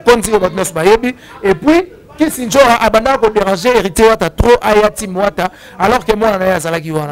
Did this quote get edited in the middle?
no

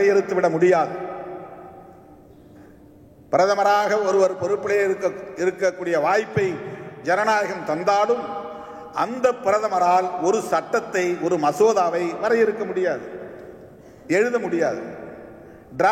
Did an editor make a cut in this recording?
no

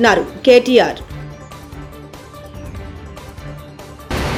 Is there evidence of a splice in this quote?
no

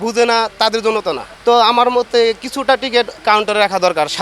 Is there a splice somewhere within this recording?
yes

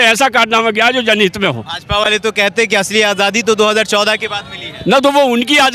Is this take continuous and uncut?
yes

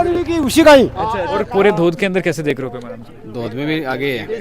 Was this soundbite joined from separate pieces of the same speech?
yes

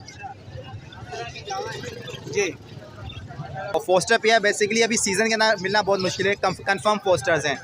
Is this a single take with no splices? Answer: no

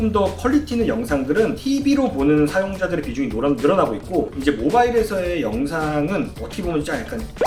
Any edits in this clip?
no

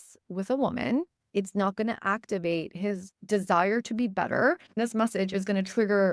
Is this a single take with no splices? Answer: no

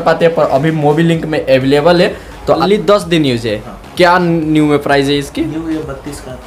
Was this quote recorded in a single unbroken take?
no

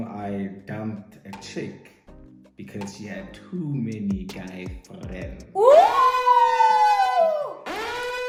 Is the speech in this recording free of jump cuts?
yes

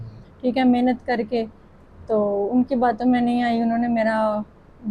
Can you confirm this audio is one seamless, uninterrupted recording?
yes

